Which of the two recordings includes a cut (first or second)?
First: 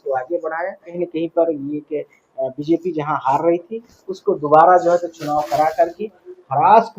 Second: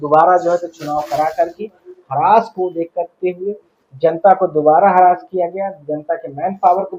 first